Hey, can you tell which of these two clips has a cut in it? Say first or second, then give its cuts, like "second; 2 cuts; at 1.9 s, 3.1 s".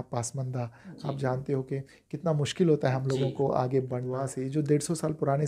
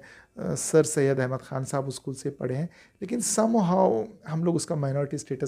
first; 1 cut; at 4.3 s